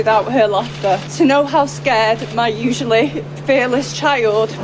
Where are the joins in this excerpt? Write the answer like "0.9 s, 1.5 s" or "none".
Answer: 1.1 s